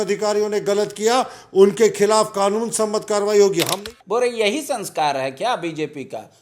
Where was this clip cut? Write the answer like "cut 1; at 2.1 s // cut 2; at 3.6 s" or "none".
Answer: cut 1; at 3.7 s